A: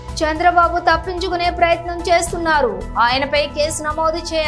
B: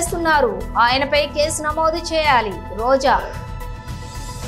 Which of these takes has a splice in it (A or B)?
B